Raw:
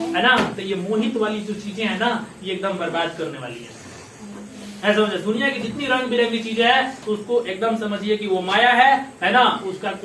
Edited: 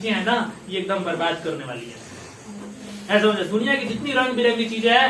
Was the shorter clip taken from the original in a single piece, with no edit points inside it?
yes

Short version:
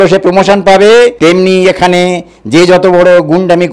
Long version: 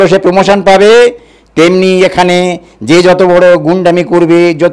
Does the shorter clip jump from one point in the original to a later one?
yes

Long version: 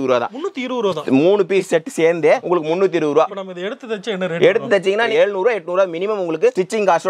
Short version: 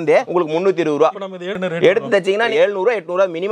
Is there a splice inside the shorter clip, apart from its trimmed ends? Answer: yes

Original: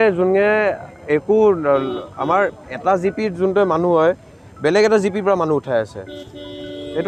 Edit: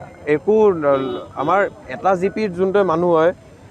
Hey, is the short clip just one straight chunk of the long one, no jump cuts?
yes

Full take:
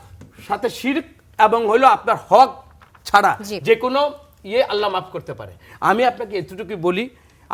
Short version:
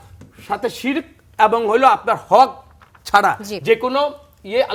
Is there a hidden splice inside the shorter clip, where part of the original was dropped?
no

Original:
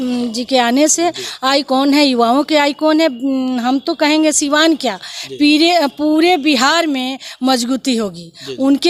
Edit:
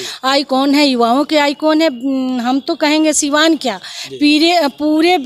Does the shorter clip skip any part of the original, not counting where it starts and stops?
no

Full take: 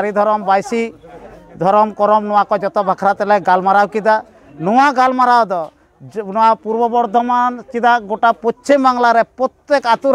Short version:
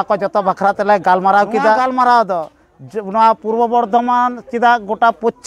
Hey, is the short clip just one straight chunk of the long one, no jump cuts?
no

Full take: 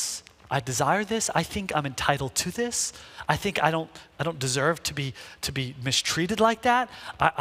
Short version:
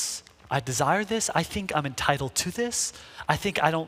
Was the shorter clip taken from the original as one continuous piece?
yes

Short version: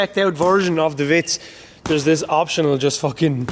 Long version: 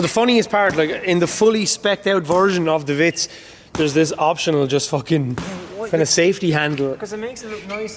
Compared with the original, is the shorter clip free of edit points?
yes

